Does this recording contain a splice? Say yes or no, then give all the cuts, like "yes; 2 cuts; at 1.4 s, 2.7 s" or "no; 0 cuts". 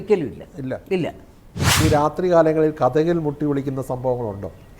yes; 1 cut; at 1.8 s